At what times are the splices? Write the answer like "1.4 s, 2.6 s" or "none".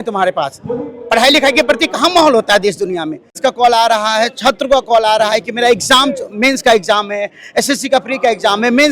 3.4 s